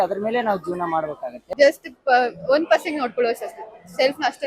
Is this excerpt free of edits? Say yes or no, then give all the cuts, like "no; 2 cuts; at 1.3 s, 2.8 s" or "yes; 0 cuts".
no; 1 cut; at 1.5 s